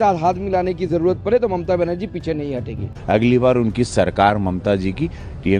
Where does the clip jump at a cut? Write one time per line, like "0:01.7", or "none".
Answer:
0:02.9